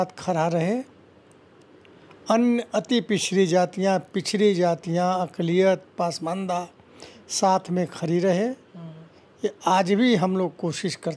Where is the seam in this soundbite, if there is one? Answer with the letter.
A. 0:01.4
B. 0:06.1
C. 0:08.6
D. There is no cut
D